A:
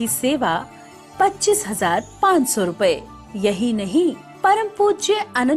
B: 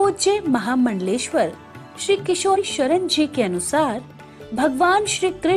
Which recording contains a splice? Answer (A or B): B